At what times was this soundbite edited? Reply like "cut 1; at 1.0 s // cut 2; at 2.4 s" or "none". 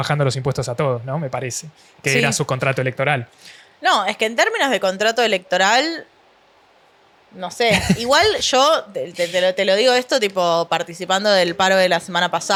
none